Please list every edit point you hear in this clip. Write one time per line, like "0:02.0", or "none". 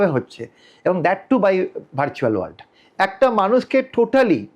none